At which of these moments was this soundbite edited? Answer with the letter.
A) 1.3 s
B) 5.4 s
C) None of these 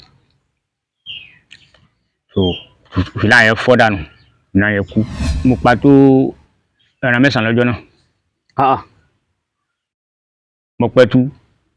B